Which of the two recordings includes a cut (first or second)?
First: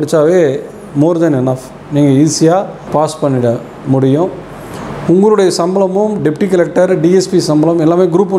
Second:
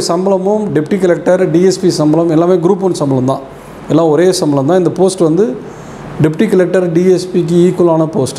first